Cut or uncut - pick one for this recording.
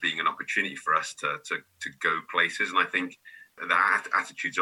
cut